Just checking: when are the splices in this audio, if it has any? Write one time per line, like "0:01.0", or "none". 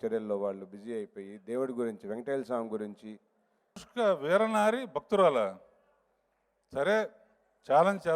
0:03.9

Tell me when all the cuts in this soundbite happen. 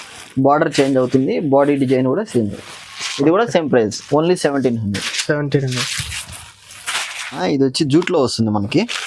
0:07.4

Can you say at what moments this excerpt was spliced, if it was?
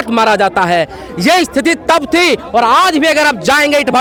none

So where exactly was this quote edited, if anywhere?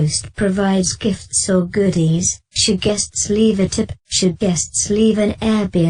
0:04.0

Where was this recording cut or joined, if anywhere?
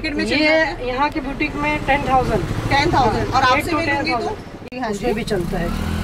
0:04.7

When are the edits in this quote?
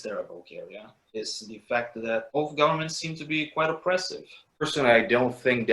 0:04.6

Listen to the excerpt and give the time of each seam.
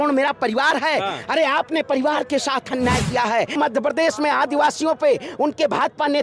0:03.6

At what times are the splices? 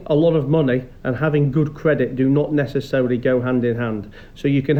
none

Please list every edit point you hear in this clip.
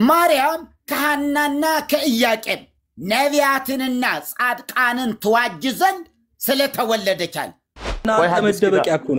0:08.1

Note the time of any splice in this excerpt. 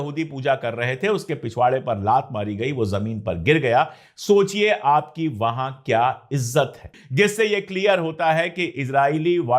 0:07.0

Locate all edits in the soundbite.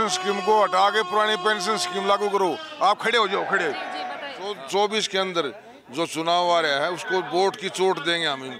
0:04.6

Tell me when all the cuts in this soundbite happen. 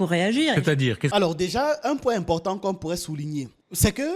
0:01.1

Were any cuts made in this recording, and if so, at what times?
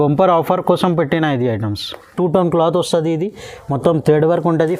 0:02.1

